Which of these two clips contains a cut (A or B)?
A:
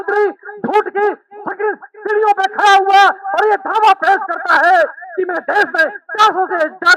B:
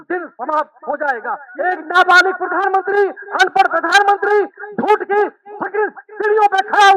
B